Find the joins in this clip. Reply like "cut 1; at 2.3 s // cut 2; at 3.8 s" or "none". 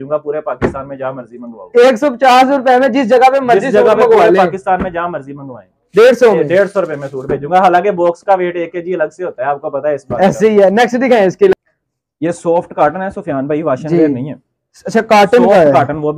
cut 1; at 11.5 s